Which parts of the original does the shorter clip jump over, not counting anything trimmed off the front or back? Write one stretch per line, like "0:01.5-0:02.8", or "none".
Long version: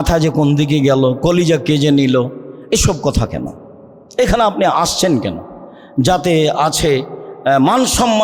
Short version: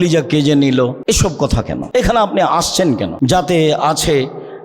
0:02.5-0:03.4
0:05.3-0:05.9